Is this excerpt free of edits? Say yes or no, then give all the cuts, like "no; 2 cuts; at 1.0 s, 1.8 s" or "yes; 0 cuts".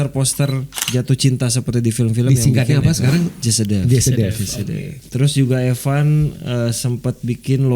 no; 1 cut; at 5.0 s